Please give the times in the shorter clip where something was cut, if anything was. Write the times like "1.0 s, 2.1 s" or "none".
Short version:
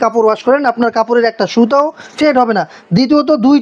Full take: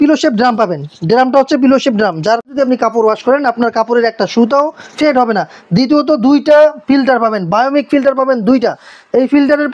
none